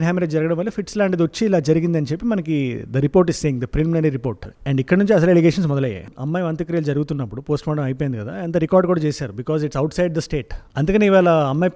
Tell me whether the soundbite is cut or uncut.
uncut